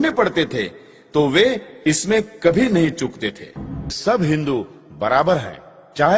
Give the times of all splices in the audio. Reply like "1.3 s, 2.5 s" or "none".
3.9 s